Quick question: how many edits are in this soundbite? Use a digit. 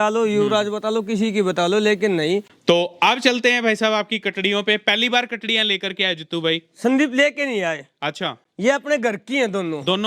1